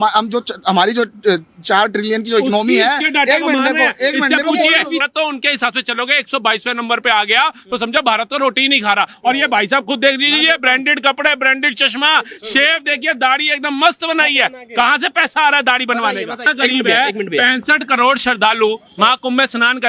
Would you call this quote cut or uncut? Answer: cut